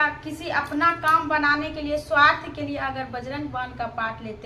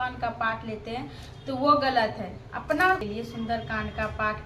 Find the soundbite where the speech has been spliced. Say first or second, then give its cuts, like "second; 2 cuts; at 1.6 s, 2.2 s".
second; 1 cut; at 3.0 s